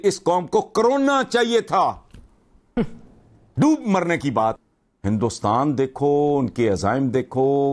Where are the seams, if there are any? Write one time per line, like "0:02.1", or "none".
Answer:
0:04.6